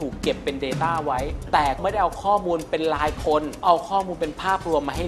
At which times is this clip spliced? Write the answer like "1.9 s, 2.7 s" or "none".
1.8 s, 3.6 s